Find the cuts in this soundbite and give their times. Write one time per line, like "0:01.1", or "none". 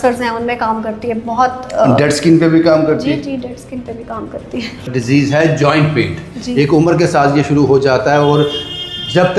0:05.0

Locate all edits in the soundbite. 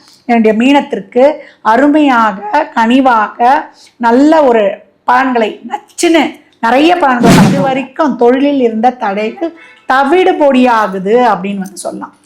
0:07.7

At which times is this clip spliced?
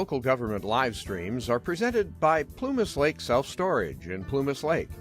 0:02.3

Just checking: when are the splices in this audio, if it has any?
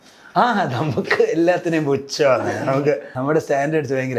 0:03.1

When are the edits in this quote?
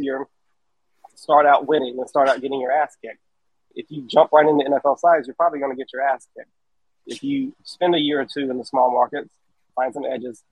0:03.6
0:07.0
0:09.6

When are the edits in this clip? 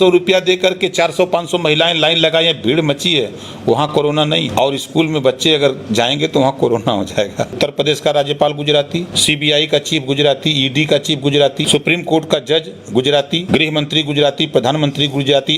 0:04.5
0:07.5
0:09.1
0:11.7
0:13.4

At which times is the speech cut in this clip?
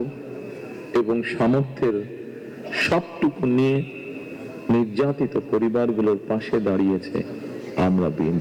none

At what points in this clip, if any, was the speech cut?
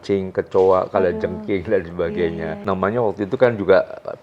none

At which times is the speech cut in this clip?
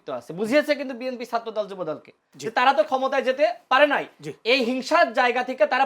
0:02.3

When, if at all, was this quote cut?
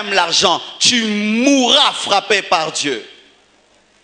none

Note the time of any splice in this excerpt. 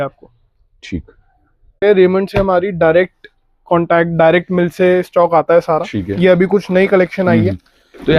0:01.7

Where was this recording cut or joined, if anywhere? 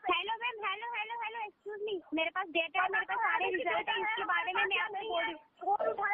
none

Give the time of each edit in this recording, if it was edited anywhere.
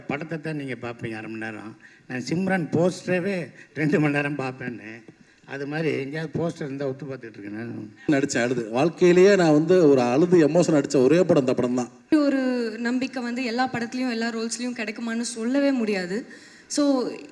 0:08.1
0:12.1

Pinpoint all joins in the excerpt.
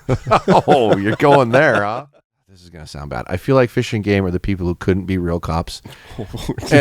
0:02.1

